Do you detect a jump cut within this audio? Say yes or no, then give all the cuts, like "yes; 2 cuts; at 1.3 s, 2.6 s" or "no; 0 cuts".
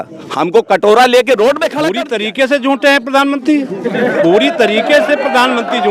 yes; 1 cut; at 1.8 s